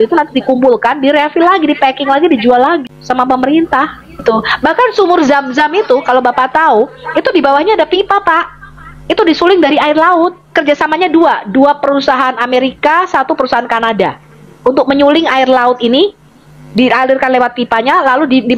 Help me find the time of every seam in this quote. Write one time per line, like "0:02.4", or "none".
0:02.9
0:04.2
0:10.4